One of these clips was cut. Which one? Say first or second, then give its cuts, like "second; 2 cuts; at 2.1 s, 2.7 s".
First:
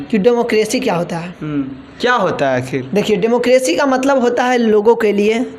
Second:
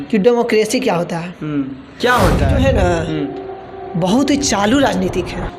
second; 1 cut; at 2.5 s